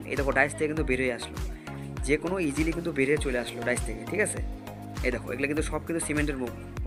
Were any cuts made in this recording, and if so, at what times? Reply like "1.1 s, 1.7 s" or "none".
none